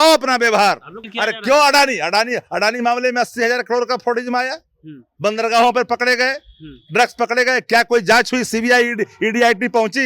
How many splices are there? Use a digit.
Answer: 1